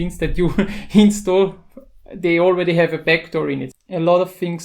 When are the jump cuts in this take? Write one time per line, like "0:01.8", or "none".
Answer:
0:03.7